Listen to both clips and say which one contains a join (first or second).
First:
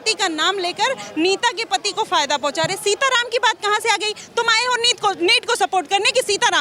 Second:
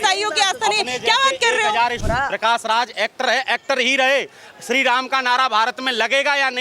second